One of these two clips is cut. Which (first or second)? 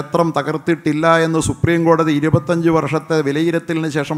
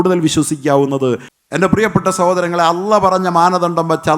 second